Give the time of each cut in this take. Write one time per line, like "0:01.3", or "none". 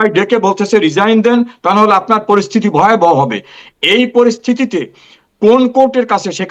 none